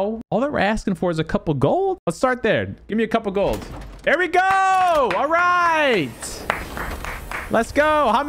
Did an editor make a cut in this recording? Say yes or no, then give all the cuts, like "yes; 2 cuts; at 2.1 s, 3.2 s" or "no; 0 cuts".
no; 0 cuts